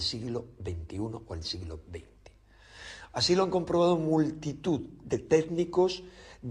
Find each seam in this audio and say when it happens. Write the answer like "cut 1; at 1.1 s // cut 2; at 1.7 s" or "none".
none